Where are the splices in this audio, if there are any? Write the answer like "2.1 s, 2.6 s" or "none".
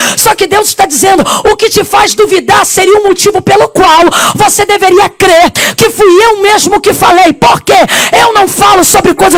none

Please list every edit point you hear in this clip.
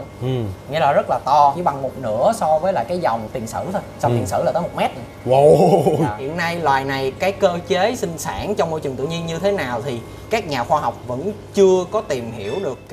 1.6 s, 3.3 s, 6.2 s

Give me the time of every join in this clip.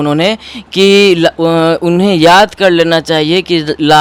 none

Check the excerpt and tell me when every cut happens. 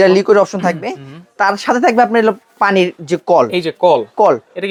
none

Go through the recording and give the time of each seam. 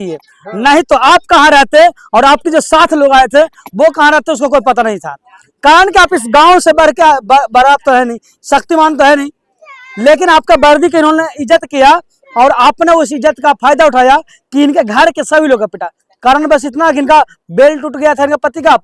none

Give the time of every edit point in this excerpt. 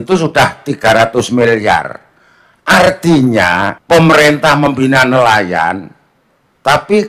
3.8 s

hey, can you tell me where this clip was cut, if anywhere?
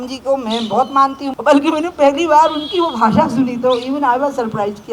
1.3 s

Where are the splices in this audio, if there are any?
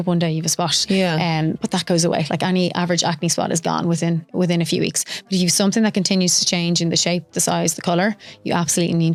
none

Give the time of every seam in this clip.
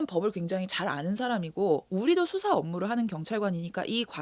none

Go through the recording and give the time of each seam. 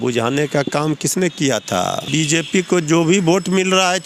2.1 s

